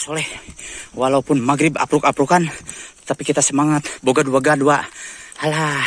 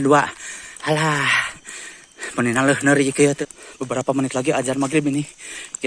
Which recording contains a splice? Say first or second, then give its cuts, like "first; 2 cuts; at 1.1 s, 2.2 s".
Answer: second; 1 cut; at 3.4 s